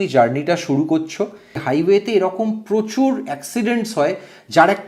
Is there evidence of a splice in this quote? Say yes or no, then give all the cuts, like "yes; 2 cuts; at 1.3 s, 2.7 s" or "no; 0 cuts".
yes; 1 cut; at 1.6 s